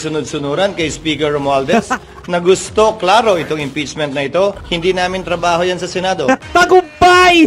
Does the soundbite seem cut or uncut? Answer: cut